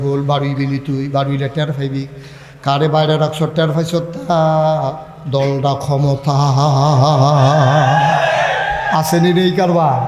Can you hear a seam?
no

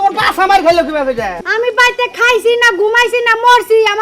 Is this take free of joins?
no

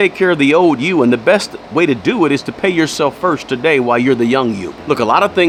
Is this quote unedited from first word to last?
yes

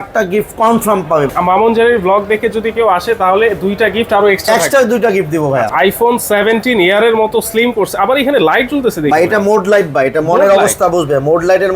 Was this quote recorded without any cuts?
no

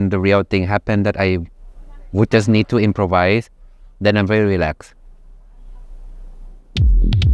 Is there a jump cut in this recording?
no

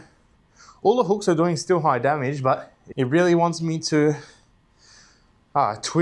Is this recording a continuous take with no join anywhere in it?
no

